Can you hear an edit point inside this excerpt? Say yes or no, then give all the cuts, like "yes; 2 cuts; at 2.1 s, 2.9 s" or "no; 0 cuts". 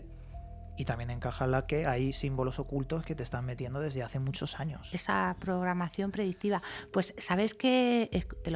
no; 0 cuts